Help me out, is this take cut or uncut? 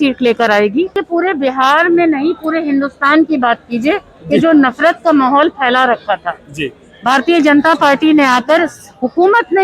cut